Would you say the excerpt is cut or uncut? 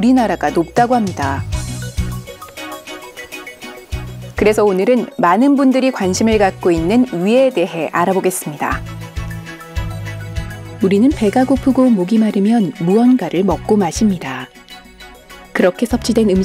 cut